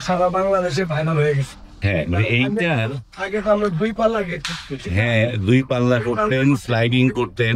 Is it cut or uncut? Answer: uncut